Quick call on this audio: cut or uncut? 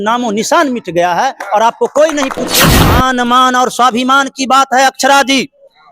cut